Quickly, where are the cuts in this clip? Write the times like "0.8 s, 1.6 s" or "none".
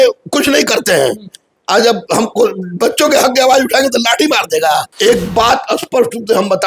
4.9 s